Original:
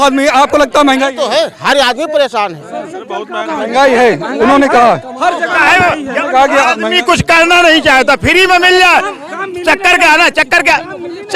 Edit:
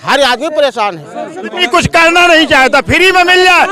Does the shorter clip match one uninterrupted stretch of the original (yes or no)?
no